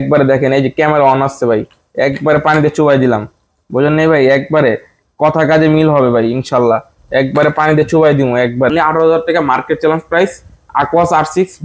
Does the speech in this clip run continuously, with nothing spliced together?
no; 1 cut; at 8.7 s

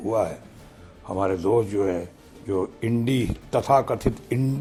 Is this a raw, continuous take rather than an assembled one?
yes; 0 cuts

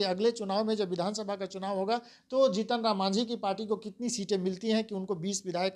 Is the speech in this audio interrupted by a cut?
no; 0 cuts

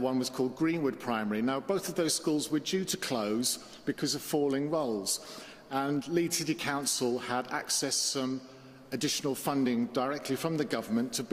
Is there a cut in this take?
no; 0 cuts

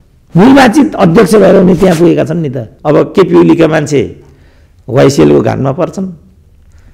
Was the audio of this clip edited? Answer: yes; 1 cut; at 2.7 s

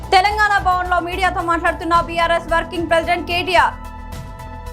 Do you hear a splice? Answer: no; 0 cuts

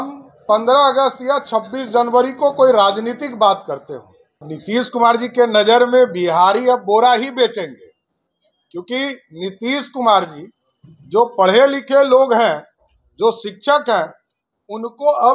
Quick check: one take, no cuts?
no; 1 cut; at 4.5 s

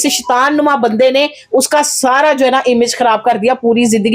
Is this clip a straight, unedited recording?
yes; 0 cuts

